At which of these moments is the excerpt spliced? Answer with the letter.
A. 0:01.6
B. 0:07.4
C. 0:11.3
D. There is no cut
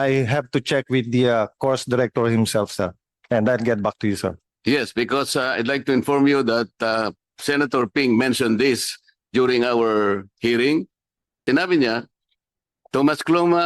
C